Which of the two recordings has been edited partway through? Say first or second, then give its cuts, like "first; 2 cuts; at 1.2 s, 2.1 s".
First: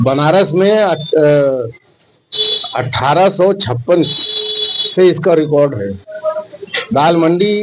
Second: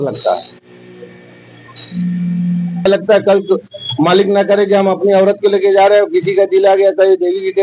second; 1 cut; at 2.9 s